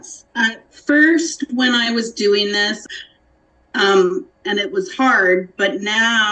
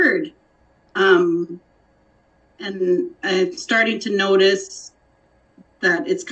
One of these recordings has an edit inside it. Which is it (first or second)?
first